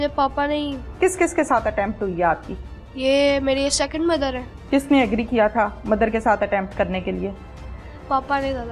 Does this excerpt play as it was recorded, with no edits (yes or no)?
no